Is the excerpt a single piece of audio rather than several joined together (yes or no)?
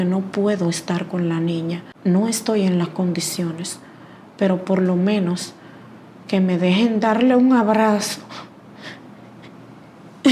no